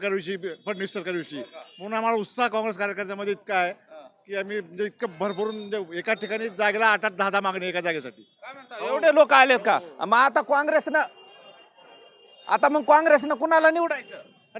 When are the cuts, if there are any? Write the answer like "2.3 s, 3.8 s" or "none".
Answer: none